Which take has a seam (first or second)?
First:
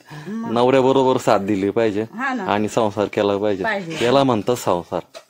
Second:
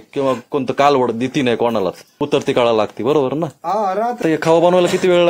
second